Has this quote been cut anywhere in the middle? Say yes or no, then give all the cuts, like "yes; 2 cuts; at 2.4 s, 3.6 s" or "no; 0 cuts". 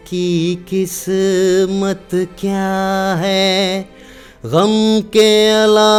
no; 0 cuts